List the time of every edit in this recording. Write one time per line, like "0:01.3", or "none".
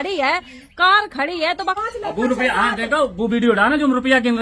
0:01.8